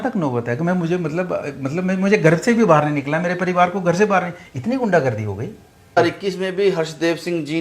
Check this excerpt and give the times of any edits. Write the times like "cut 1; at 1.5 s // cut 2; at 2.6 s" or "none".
cut 1; at 6.0 s